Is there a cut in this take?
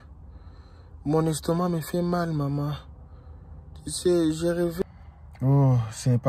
yes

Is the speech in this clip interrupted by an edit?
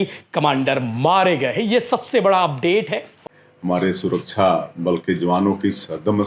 yes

